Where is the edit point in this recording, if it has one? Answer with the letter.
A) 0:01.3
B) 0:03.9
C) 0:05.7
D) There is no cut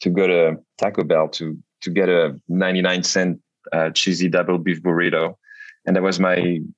D